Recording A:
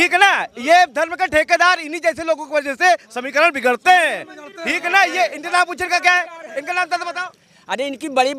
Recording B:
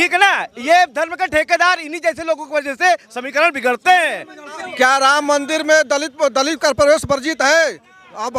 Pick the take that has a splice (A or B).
B